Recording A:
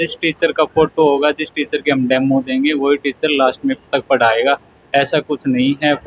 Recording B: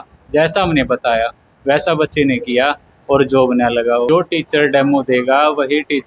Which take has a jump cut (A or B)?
B